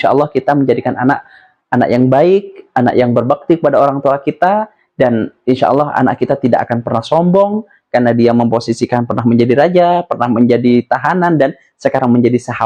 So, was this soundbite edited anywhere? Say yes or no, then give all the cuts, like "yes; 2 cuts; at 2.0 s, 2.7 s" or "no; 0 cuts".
no; 0 cuts